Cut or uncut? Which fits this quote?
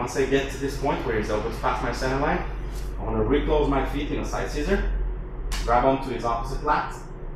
uncut